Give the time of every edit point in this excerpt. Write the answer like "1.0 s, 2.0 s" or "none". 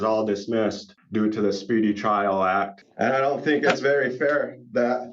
0.9 s, 2.8 s